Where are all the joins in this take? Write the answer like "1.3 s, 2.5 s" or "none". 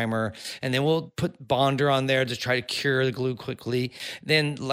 1.3 s